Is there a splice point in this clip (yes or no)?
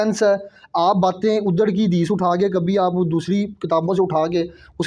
no